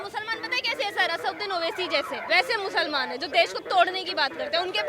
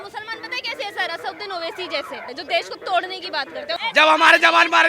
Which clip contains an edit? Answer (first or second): second